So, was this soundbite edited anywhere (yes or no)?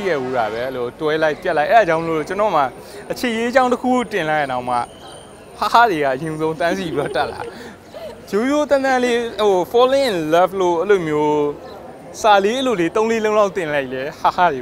no